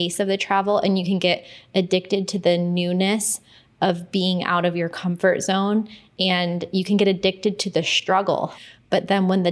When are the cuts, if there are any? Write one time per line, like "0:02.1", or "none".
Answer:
0:08.5